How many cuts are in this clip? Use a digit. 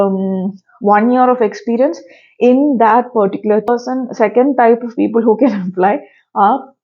1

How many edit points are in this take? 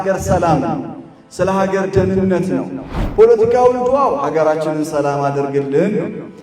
1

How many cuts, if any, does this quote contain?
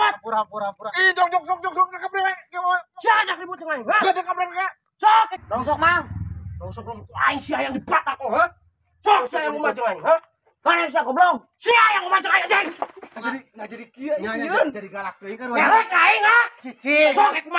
2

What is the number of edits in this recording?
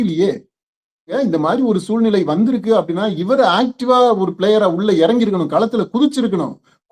1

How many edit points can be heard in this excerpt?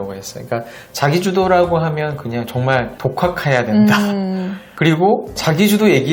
0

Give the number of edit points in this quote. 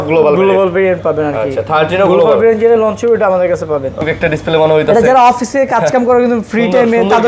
1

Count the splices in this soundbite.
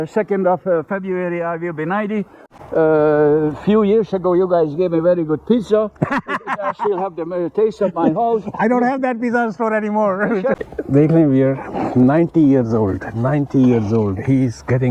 2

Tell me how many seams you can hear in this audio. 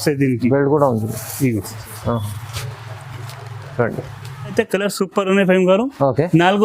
1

